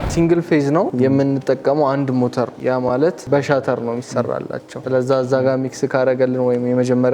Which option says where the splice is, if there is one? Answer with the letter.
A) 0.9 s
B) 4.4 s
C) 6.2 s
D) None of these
A